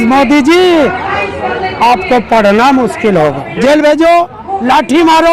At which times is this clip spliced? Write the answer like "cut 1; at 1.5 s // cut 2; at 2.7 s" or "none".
cut 1; at 3.5 s